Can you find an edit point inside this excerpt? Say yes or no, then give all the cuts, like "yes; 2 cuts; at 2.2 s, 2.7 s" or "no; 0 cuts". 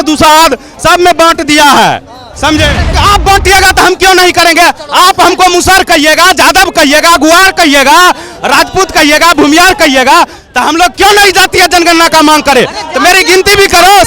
yes; 1 cut; at 3.0 s